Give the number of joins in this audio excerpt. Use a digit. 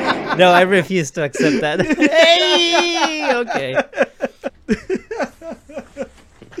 1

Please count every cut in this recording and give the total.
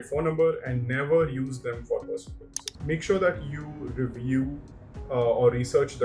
1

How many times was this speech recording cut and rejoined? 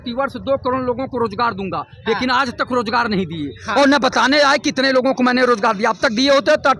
0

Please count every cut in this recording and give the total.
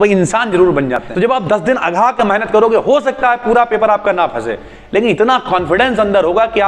1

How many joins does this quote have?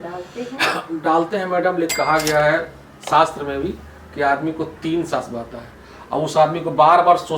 1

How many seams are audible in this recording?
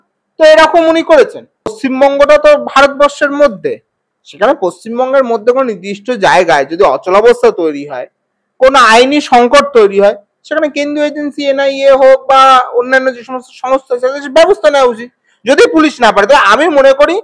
1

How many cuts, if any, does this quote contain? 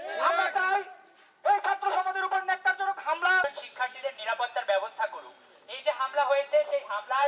1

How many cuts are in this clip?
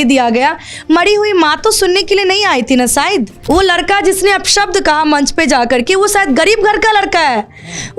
1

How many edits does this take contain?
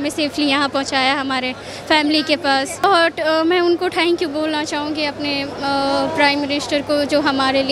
1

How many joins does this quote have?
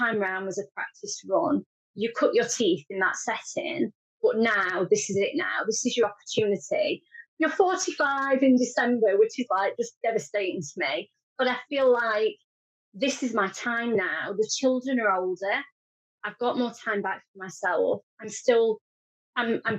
0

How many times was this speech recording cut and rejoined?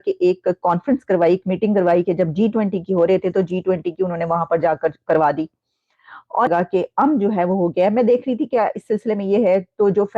1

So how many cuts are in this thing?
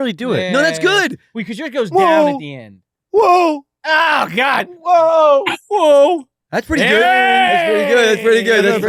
0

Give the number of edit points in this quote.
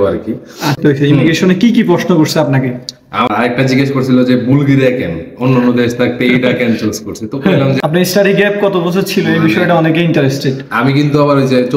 3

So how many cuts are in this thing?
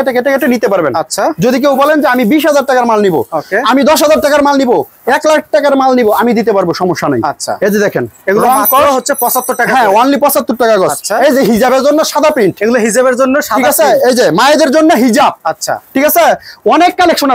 0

